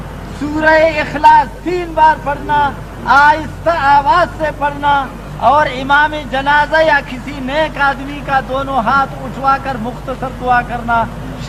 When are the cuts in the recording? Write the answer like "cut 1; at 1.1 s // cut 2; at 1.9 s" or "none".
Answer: none